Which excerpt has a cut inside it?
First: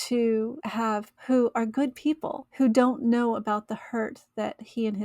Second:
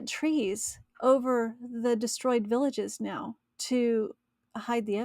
first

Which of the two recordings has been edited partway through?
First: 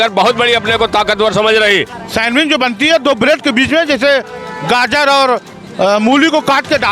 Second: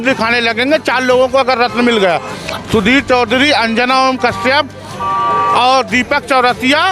first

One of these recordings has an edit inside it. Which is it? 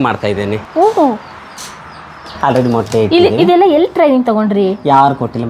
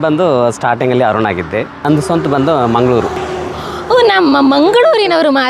second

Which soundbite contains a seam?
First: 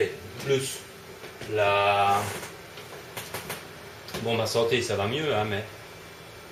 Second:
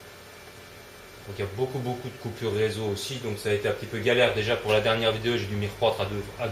second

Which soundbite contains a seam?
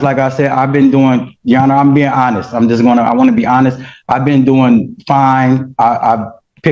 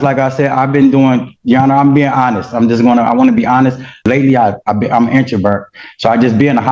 second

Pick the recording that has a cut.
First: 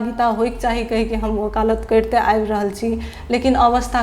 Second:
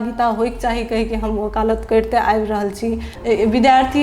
second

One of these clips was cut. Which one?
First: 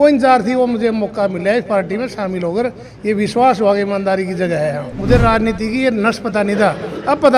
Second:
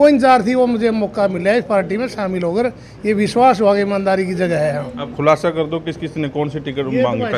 first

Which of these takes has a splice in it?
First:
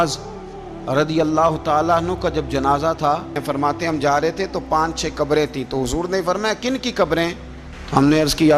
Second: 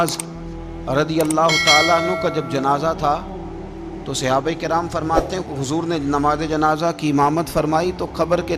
first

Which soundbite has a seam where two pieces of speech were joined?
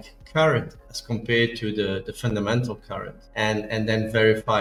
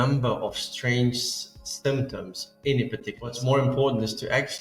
second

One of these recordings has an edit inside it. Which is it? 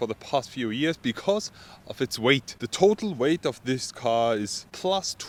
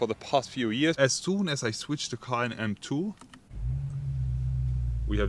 second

